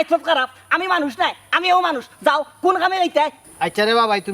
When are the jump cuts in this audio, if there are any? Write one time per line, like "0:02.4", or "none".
0:03.4